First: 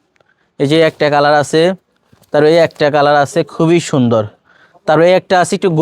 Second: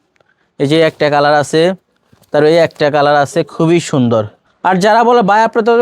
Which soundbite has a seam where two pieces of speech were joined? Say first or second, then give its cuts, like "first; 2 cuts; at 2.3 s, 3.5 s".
second; 1 cut; at 4.4 s